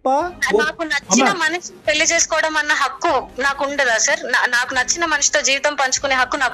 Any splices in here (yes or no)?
no